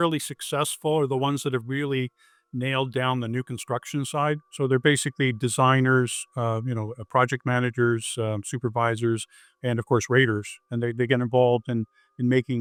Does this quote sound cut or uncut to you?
uncut